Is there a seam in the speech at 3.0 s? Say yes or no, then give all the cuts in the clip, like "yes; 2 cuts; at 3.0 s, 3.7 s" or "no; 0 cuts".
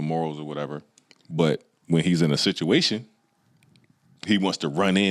no; 0 cuts